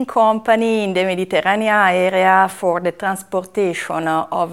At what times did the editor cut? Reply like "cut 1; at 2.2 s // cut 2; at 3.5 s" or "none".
none